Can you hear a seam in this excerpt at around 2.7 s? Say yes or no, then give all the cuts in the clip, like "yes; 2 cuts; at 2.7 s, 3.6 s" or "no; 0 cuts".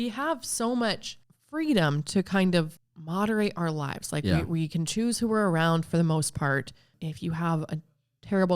yes; 2 cuts; at 2.7 s, 6.9 s